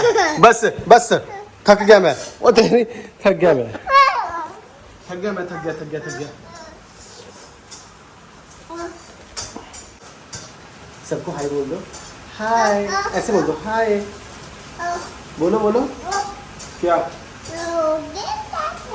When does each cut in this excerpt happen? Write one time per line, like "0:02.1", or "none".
none